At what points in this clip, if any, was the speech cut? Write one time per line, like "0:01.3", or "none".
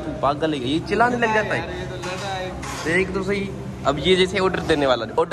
0:04.0

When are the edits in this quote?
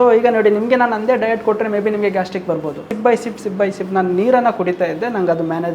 0:02.9

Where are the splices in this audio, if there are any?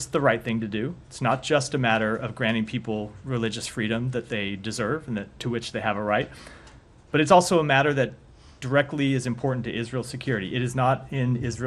0:03.2
0:08.2

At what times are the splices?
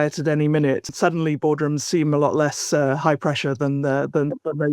0:00.9

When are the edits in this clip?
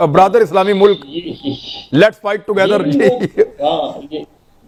none

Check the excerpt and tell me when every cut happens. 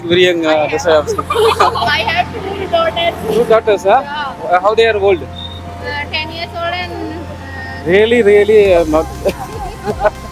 none

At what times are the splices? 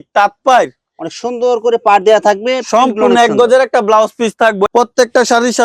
0:04.7

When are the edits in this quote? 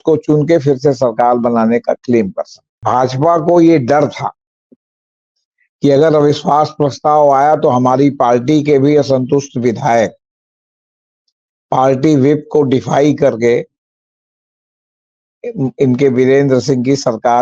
0:02.8

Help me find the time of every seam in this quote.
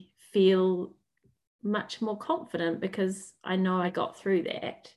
0:03.9

